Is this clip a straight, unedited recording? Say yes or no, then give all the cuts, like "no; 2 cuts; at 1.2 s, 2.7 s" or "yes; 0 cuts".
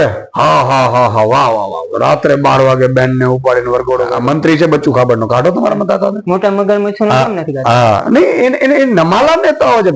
no; 1 cut; at 4.1 s